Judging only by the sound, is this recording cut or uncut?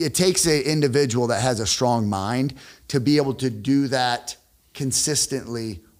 uncut